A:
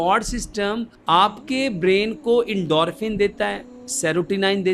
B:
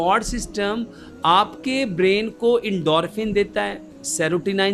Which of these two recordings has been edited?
A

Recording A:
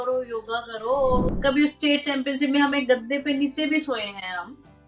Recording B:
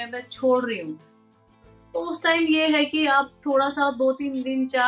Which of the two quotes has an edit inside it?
A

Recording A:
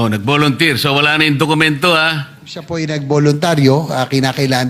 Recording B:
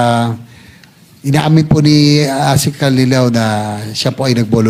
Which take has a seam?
A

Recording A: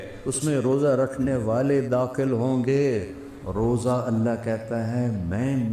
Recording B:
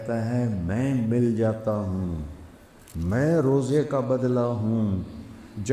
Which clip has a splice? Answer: A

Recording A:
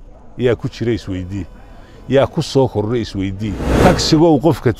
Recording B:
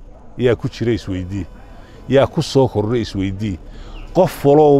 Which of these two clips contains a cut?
A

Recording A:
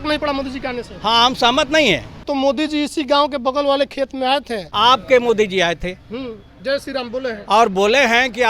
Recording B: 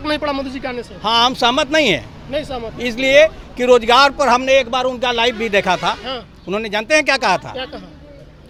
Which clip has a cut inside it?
A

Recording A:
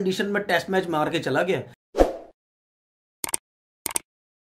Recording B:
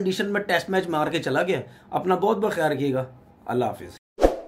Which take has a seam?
A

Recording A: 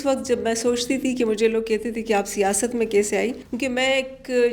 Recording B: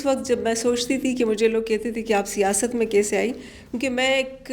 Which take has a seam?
A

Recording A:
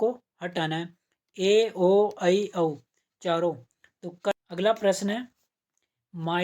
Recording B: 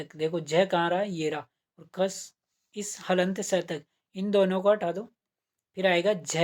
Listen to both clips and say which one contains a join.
A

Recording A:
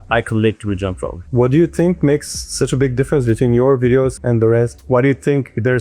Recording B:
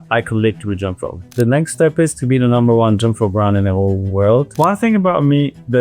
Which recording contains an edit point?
B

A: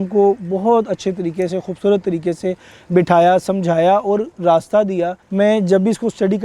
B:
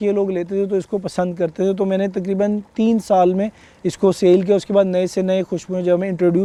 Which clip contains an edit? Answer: A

